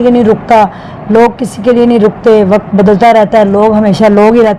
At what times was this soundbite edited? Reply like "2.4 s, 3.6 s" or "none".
none